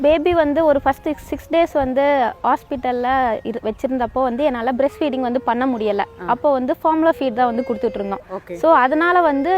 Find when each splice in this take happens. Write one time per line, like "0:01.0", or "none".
none